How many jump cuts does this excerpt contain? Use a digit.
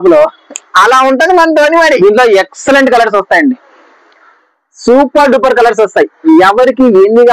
1